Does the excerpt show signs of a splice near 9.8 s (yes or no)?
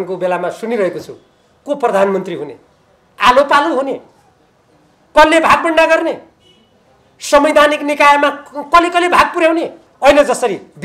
yes